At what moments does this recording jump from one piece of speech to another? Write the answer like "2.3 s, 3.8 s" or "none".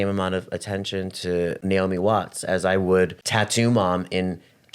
1.6 s, 3.2 s